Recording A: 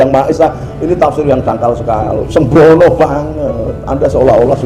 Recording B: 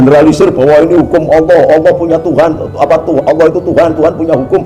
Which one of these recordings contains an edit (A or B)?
A